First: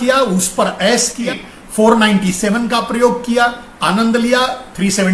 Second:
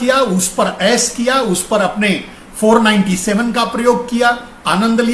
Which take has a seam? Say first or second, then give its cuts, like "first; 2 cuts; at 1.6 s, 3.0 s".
first; 1 cut; at 1.3 s